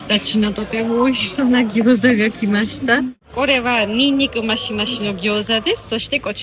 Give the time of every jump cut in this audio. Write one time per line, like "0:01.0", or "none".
0:03.3